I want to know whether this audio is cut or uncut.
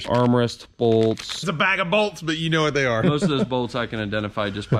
cut